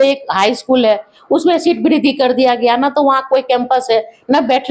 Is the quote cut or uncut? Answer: uncut